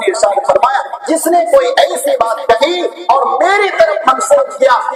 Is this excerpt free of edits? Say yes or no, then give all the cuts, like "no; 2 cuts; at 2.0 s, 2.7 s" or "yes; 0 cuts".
yes; 0 cuts